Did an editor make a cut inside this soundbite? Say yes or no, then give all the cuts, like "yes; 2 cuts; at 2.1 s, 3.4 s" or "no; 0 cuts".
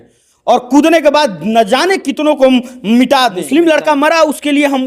yes; 1 cut; at 3.4 s